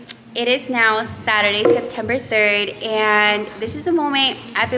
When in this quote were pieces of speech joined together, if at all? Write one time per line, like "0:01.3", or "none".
none